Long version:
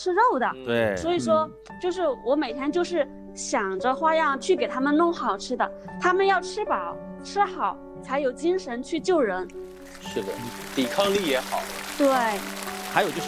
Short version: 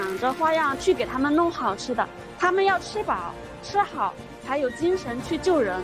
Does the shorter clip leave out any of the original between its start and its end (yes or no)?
no